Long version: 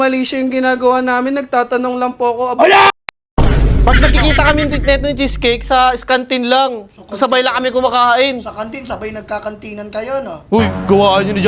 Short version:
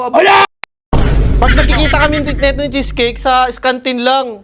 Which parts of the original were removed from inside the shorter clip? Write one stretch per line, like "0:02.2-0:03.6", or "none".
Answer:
none